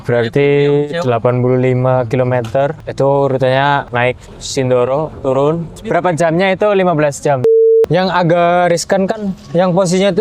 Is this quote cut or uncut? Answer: cut